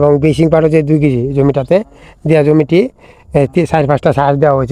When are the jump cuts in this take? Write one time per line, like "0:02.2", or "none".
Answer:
none